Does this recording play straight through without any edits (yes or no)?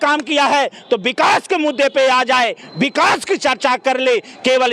yes